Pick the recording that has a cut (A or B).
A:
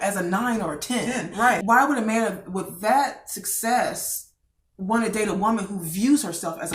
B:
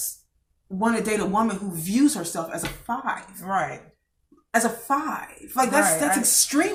A